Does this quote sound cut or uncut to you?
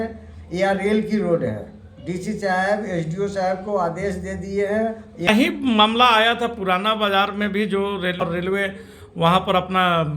cut